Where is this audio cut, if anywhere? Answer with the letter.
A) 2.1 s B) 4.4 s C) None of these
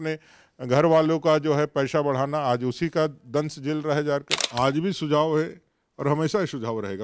B